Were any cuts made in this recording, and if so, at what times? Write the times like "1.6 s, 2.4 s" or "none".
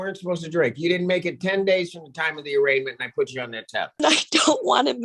4.0 s